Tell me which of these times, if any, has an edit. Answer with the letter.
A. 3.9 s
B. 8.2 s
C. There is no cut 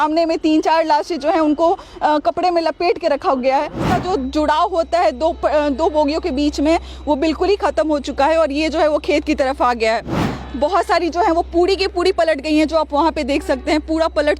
A